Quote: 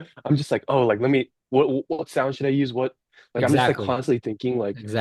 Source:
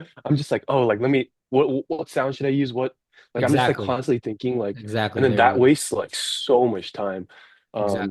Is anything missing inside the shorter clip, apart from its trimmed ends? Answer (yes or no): no